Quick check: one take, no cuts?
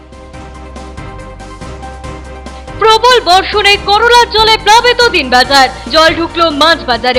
yes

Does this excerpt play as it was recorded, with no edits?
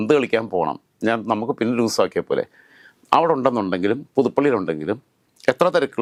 yes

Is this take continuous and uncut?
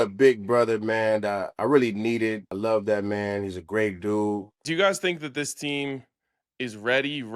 no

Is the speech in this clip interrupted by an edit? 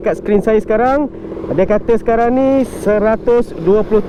no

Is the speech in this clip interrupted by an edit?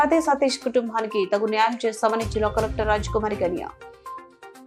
no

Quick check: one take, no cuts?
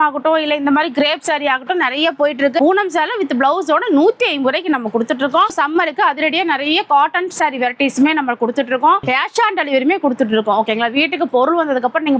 no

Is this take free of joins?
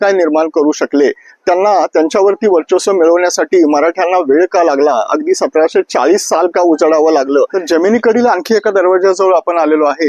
no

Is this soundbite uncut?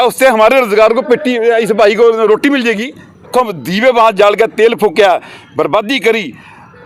no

